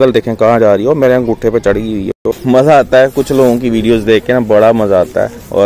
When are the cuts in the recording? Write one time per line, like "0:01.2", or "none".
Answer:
0:02.1

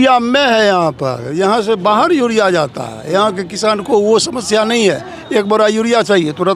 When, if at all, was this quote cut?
none

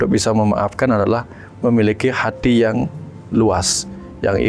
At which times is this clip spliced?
none

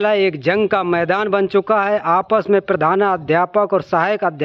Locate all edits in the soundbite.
none

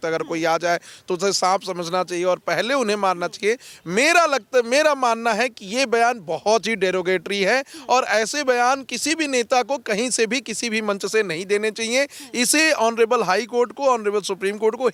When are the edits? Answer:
none

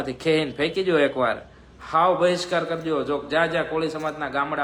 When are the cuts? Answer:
none

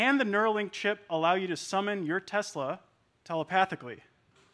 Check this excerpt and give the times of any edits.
none

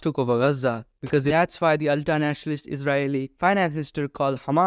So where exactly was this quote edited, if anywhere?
0:01.3

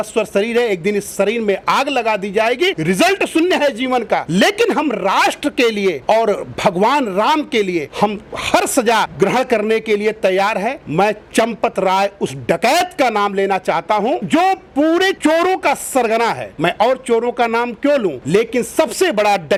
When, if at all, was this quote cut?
none

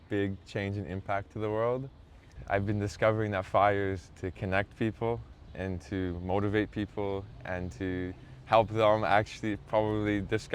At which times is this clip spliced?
0:02.3

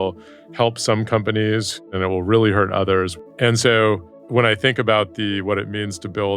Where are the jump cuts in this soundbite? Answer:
0:01.8
0:03.1
0:04.1

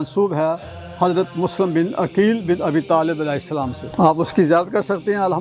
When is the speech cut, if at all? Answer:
0:03.8

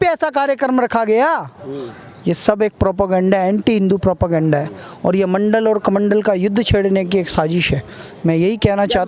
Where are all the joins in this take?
none

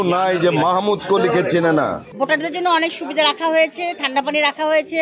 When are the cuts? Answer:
0:02.0

